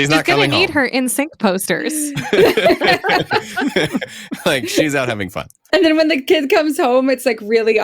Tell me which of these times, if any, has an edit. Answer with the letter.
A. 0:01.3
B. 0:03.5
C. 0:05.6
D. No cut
C